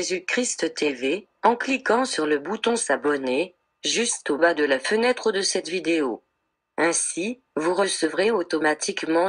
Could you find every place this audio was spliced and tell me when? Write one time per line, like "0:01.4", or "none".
none